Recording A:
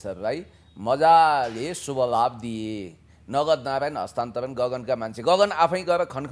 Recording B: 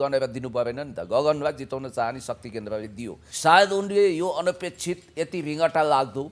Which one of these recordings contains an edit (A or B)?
B